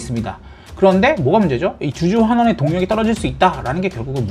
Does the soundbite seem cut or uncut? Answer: uncut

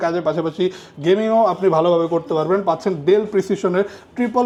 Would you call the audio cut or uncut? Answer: uncut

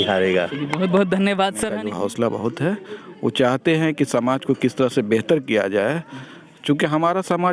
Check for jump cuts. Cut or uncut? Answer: cut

